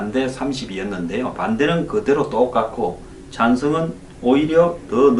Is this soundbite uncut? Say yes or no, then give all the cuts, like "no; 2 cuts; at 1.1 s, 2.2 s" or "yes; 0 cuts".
no; 1 cut; at 3.7 s